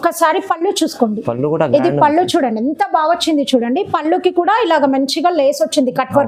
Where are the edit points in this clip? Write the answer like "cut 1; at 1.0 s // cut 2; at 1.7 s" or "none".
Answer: none